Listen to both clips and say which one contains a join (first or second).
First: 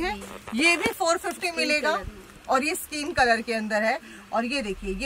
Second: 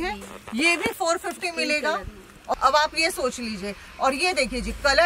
second